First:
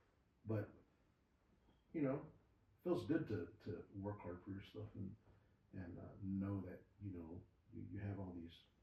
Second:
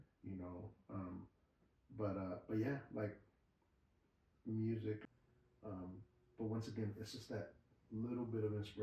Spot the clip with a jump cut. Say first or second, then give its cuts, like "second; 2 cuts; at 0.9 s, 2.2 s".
second; 1 cut; at 5.0 s